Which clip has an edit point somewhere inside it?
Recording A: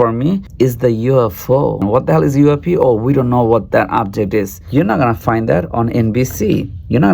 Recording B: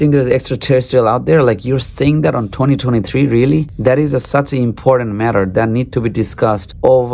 A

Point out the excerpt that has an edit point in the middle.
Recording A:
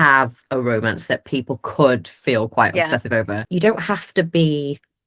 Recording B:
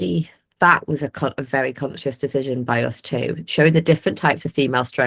A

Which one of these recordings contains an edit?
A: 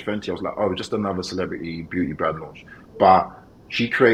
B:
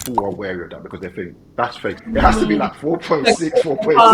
B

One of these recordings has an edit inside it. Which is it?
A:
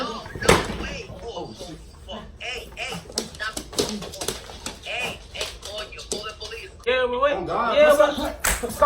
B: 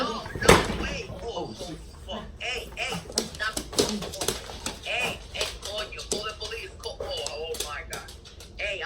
A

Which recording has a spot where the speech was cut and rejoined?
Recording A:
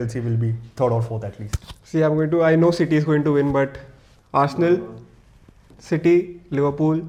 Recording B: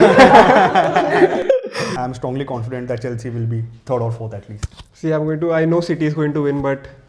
B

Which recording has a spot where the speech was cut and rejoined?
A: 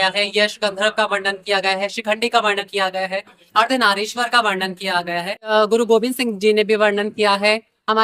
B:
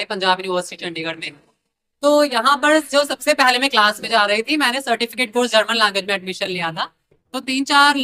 A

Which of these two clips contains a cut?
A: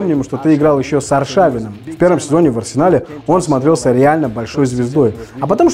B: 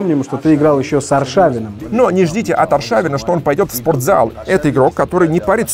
B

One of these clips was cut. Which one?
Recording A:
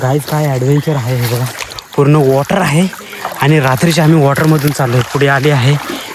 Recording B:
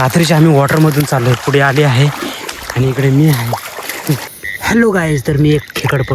B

